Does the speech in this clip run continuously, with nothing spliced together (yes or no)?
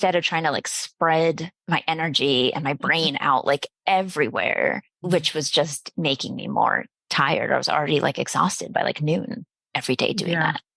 no